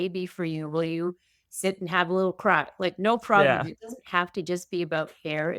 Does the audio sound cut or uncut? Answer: uncut